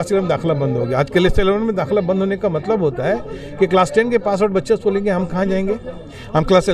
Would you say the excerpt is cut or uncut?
uncut